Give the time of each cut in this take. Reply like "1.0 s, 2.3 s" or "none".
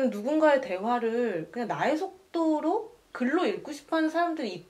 none